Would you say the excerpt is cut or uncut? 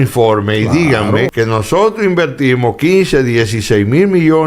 cut